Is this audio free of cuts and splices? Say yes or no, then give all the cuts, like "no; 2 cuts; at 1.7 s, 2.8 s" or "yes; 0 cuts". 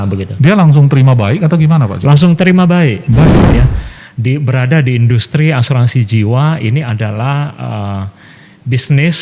no; 1 cut; at 3.4 s